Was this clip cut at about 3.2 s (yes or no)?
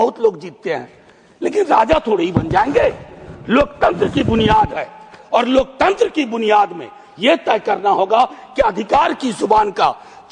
no